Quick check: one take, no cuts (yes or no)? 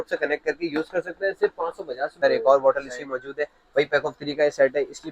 no